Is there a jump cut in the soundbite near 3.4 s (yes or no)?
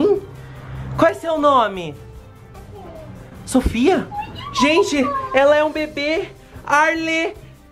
no